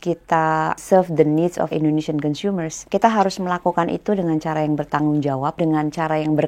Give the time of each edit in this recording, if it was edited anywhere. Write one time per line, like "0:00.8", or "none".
0:00.8
0:01.7
0:02.8
0:05.6